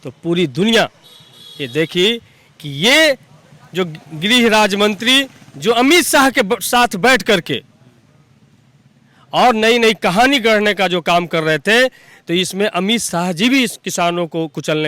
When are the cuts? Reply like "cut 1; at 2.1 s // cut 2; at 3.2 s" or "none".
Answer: none